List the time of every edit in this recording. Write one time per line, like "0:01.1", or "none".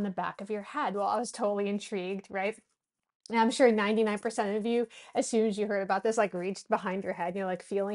none